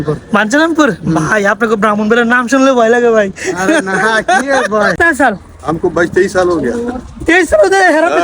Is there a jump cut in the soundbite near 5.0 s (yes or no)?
yes